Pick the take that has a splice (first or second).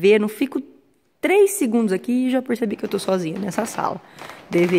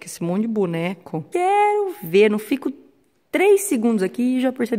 second